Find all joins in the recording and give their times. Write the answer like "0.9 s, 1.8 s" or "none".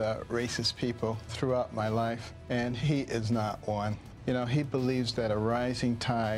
1.3 s, 2.3 s, 4.1 s